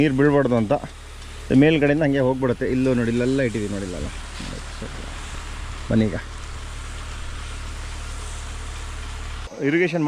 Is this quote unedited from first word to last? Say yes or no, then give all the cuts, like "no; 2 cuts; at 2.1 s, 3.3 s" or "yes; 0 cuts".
yes; 0 cuts